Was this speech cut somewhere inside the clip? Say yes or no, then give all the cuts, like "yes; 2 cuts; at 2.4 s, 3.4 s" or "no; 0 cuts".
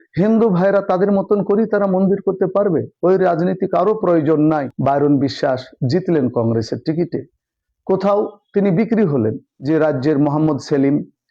yes; 2 cuts; at 4.7 s, 9.5 s